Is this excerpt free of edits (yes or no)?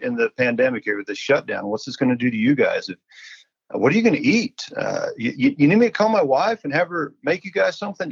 yes